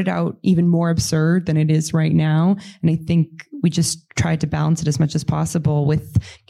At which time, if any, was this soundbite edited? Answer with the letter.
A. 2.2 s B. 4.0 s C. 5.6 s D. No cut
D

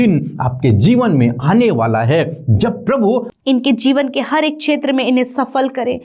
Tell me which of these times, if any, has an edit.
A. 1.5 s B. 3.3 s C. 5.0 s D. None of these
B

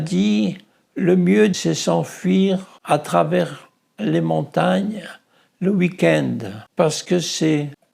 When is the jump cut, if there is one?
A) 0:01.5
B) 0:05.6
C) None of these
A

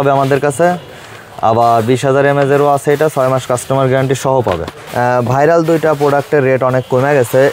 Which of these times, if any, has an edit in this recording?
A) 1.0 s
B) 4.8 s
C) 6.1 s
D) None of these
B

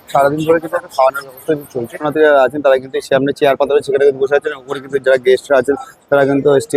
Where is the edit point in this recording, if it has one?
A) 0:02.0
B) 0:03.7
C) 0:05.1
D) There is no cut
A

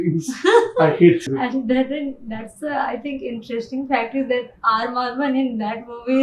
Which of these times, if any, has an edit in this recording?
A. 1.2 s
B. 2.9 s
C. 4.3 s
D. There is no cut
A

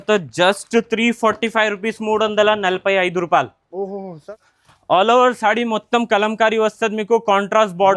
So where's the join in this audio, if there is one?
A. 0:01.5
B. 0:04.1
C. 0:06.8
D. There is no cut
B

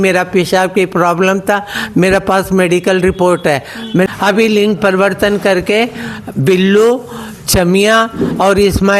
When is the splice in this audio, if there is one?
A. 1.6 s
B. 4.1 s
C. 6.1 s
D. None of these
B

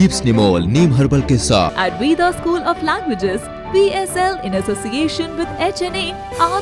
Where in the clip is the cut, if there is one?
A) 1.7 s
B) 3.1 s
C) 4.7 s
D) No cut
A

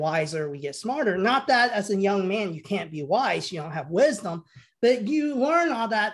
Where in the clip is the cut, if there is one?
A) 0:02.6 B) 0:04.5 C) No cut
C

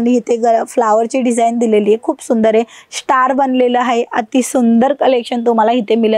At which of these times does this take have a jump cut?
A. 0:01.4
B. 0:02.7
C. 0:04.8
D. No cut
D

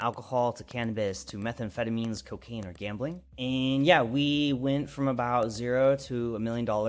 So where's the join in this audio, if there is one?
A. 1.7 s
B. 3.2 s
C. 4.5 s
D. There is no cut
D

